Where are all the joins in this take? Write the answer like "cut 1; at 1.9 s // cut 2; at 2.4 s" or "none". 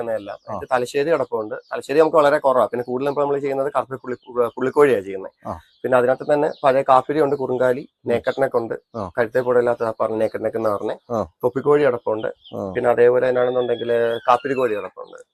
none